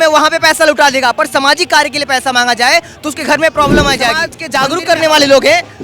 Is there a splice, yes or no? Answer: yes